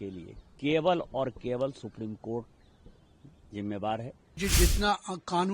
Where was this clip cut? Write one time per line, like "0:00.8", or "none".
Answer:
0:04.4